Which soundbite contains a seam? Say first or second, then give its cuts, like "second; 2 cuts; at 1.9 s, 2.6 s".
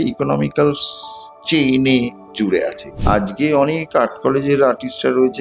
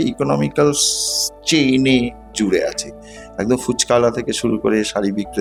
first; 1 cut; at 2.9 s